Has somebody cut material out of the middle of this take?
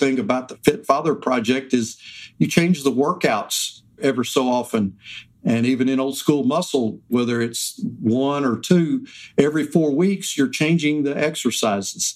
yes; 2 cuts; at 4.0 s, 7.1 s

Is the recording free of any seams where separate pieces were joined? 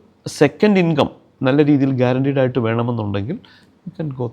yes; 0 cuts

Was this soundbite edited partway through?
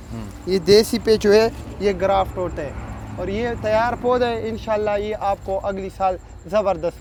no; 0 cuts

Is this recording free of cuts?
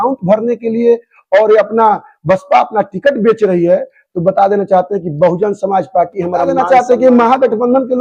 no; 1 cut; at 6.5 s

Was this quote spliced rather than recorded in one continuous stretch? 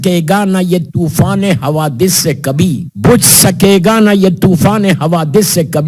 no; 0 cuts

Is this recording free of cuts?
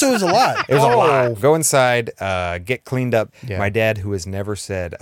no; 2 cuts; at 1.4 s, 3.4 s

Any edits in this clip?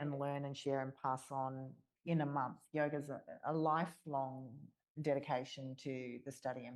no; 0 cuts

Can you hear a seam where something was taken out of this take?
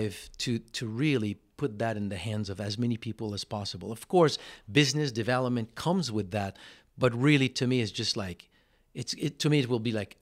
no; 0 cuts

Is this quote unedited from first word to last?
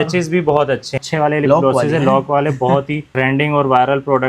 no; 2 cuts; at 1.0 s, 3.0 s

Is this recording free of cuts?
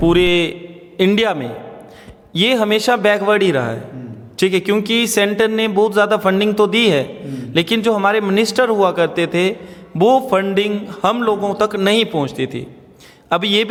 yes; 0 cuts

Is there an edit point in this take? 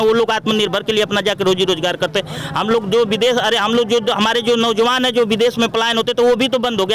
no; 0 cuts

